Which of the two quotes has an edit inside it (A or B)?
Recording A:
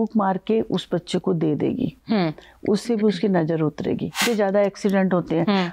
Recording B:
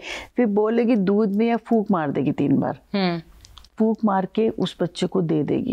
A